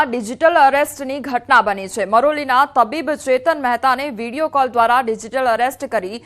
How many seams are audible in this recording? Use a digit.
0